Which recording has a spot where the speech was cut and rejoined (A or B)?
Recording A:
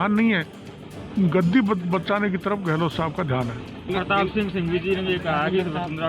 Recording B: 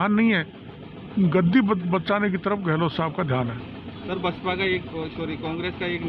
A